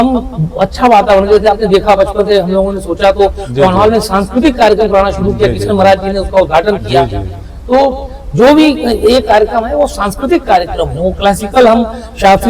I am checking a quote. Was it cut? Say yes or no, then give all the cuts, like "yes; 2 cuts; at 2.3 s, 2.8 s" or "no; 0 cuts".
no; 0 cuts